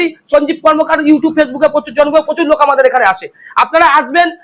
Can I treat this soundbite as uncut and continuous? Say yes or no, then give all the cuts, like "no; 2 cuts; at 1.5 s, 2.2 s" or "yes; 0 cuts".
yes; 0 cuts